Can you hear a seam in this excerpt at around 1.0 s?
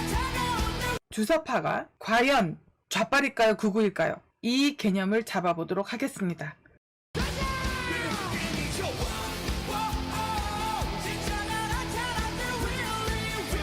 yes; 1 cut; at 1.0 s

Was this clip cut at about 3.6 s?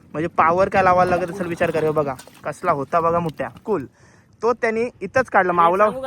yes; 1 cut; at 3.6 s

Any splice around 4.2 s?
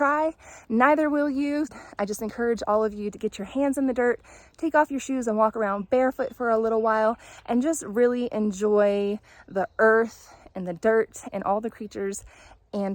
no; 1 cut; at 1.7 s

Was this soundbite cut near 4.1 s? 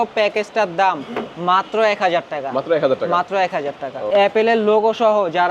yes; 1 cut; at 4.1 s

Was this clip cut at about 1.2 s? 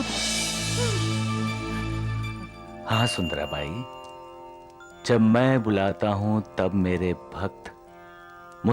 no; 0 cuts

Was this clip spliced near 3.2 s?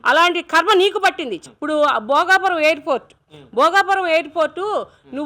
no; 1 cut; at 1.5 s

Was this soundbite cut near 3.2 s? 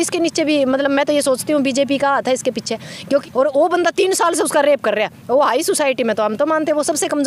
yes; 1 cut; at 3.2 s

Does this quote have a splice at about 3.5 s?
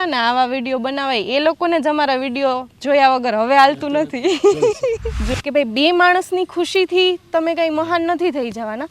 no; 1 cut; at 5.3 s

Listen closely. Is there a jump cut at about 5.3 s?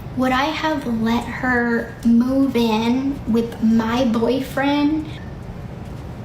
yes; 1 cut; at 5.3 s

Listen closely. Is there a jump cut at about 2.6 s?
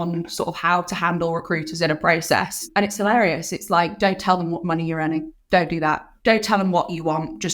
yes; 3 cuts; at 2.6 s, 5.4 s, 6.1 s

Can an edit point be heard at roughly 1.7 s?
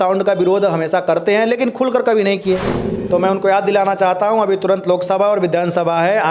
no; 1 cut; at 2.9 s

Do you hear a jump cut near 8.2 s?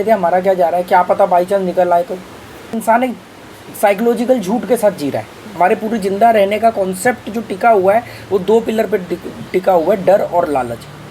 no; 2 cuts; at 2.7 s, 5.4 s

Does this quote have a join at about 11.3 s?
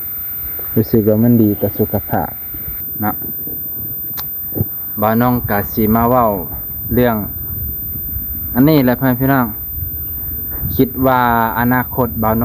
no; 1 cut; at 2.8 s

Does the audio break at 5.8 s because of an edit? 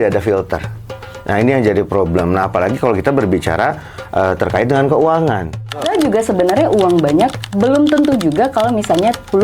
yes; 1 cut; at 5.8 s

